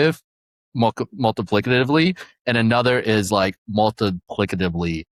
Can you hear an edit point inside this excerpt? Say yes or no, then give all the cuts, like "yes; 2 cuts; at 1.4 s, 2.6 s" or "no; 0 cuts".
no; 0 cuts